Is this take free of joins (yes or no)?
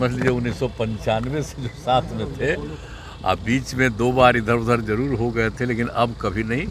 yes